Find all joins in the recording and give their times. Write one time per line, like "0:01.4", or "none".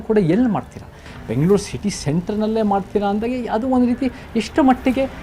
0:01.1